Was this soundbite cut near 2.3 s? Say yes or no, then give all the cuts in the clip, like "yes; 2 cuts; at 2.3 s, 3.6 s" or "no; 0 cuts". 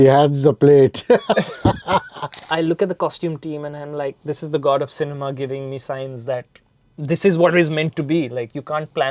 yes; 1 cut; at 2.3 s